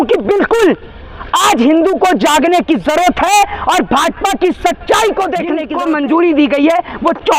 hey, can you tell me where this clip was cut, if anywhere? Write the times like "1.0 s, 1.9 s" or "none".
5.7 s